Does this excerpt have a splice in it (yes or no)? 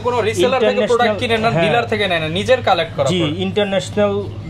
no